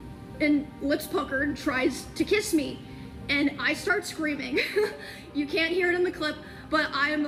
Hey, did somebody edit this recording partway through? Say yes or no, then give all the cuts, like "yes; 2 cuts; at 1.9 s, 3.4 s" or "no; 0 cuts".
no; 0 cuts